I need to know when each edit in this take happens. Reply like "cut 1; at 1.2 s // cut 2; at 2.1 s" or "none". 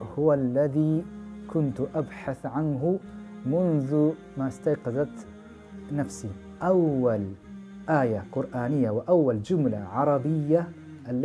cut 1; at 6.5 s